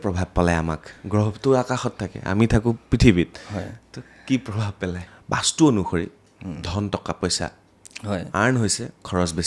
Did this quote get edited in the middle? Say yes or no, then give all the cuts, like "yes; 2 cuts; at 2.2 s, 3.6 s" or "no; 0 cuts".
yes; 1 cut; at 5.0 s